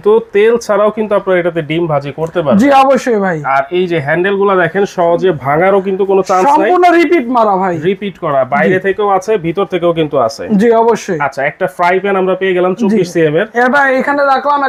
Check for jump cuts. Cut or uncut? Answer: uncut